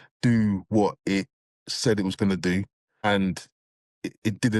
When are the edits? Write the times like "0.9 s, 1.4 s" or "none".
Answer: 3.0 s